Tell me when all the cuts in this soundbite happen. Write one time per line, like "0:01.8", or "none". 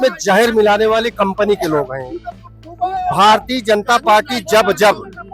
none